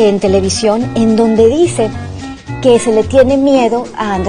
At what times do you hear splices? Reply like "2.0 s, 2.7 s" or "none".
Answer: none